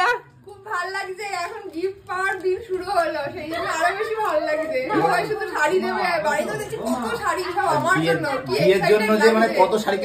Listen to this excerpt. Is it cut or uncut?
uncut